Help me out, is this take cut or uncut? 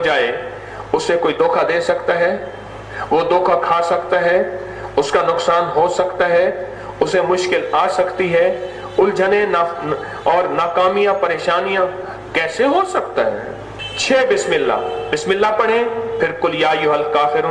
uncut